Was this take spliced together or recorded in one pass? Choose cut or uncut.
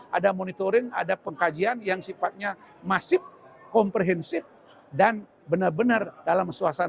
uncut